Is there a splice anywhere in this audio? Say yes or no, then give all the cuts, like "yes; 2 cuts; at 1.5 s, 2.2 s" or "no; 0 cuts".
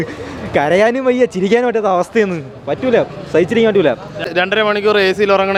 no; 0 cuts